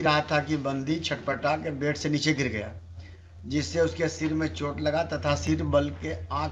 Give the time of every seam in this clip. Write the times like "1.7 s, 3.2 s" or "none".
none